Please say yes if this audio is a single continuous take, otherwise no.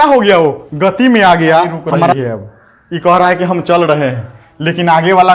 no